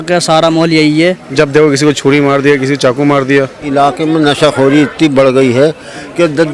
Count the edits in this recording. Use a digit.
2